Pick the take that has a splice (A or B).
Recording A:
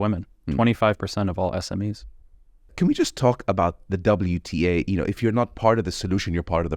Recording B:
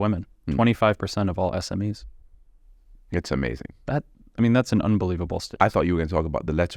A